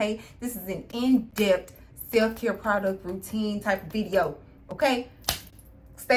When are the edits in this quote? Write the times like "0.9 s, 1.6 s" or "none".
none